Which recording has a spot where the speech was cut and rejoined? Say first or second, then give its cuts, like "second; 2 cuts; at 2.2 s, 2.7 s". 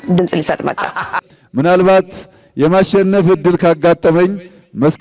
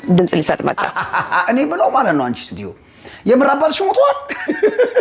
first; 1 cut; at 1.2 s